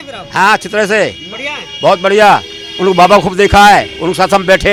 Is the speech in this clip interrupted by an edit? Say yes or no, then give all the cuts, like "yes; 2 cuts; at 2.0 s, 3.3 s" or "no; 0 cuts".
no; 0 cuts